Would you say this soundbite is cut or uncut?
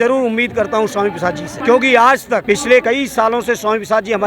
cut